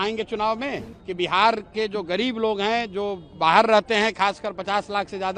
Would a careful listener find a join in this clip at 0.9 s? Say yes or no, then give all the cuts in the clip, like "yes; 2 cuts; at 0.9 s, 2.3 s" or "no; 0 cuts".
yes; 1 cut; at 0.9 s